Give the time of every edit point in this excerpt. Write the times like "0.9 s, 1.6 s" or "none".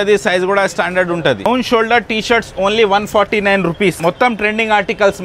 4.0 s